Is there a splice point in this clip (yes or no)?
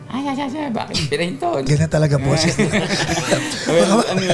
yes